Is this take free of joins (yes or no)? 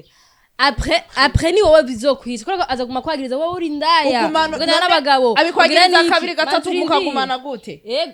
yes